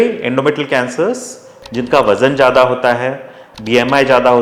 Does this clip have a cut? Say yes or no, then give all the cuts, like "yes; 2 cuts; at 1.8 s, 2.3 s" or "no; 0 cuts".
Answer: yes; 2 cuts; at 1.5 s, 3.4 s